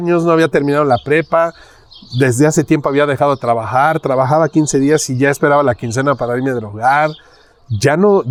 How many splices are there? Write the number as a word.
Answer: zero